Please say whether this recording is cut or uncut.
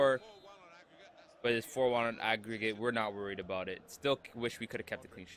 uncut